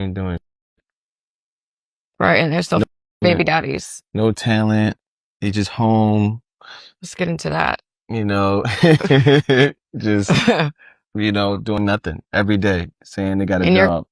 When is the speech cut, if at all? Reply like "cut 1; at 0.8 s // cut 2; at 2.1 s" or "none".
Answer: none

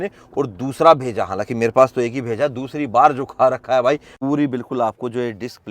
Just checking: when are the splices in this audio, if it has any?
cut 1; at 4.1 s

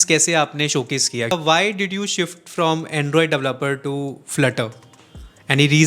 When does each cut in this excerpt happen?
cut 1; at 1.3 s

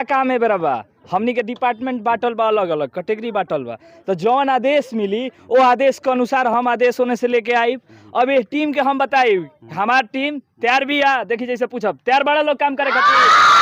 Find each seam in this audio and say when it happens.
none

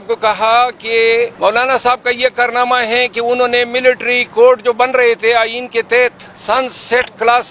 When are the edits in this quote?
cut 1; at 1.3 s // cut 2; at 6.3 s

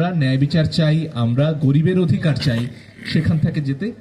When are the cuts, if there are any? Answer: none

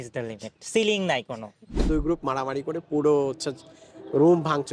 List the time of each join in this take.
cut 1; at 1.8 s

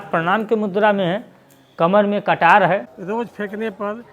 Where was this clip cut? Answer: cut 1; at 3.0 s

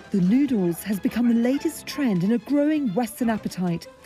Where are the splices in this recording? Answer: none

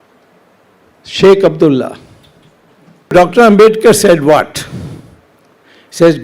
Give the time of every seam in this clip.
cut 1; at 3.1 s

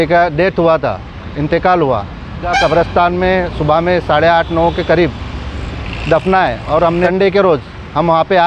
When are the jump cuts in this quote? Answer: cut 1; at 2.5 s // cut 2; at 7.0 s

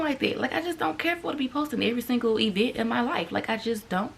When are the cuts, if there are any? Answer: none

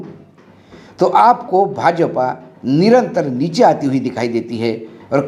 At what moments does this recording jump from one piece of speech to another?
none

